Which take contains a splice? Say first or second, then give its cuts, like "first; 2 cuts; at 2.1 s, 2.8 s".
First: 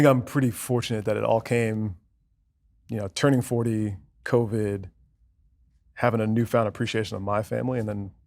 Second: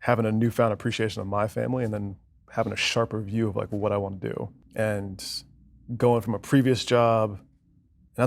second; 1 cut; at 4.6 s